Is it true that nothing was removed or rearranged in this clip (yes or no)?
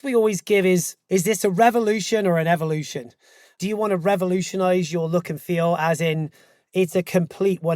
no